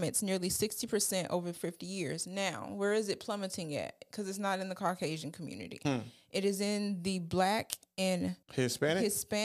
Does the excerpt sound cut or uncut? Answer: uncut